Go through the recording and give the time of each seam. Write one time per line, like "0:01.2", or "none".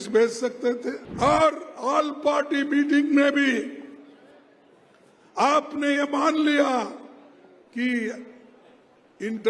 0:01.0